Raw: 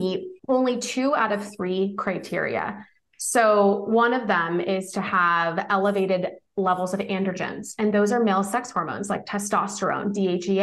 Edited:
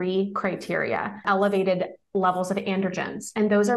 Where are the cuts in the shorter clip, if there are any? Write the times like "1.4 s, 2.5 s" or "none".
1.2 s